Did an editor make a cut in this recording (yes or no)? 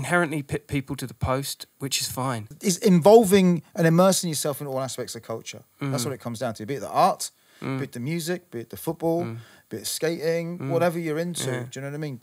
yes